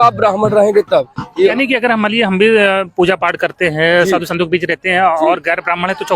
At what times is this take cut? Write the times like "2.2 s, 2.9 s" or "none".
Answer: 1.5 s